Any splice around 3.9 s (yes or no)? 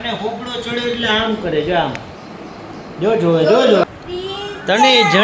yes